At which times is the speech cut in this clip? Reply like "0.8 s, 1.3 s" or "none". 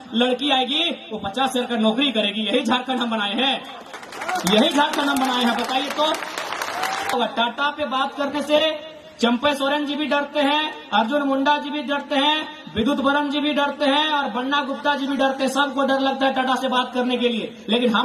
7.1 s